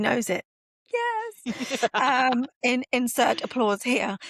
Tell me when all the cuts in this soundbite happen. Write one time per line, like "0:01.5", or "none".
none